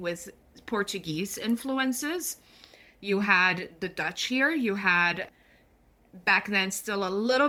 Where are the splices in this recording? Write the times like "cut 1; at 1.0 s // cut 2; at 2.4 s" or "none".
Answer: none

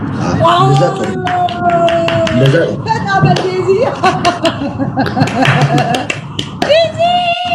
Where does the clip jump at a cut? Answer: none

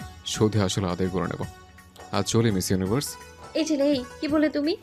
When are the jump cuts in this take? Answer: cut 1; at 3.3 s

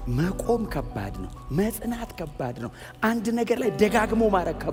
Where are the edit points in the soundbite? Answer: none

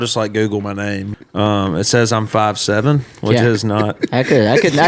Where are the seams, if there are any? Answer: cut 1; at 1.1 s

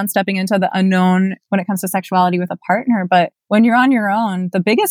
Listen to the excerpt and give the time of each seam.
cut 1; at 3.4 s

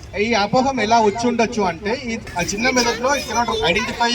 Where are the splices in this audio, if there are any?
cut 1; at 2.2 s

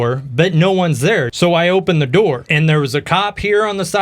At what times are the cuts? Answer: cut 1; at 1.3 s // cut 2; at 2.5 s

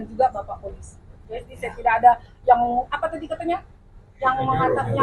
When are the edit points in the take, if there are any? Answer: cut 1; at 1.1 s

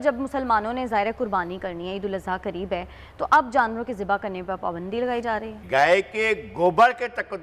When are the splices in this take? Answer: cut 1; at 5.6 s

